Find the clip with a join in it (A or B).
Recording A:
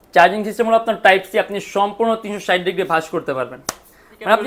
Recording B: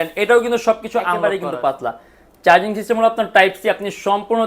B